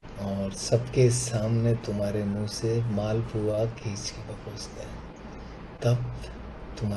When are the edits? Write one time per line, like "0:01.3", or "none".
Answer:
none